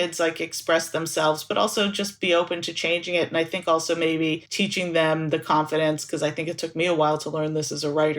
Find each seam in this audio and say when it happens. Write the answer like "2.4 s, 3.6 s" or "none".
4.5 s